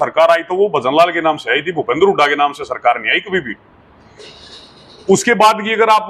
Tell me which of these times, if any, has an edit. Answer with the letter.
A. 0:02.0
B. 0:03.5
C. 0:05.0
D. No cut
D